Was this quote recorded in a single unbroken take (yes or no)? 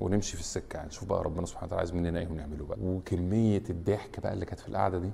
no